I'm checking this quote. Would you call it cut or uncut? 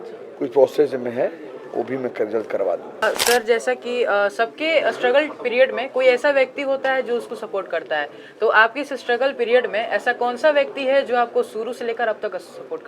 cut